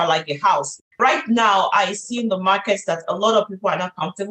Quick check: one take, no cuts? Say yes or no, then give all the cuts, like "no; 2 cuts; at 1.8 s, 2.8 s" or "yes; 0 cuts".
no; 1 cut; at 1.0 s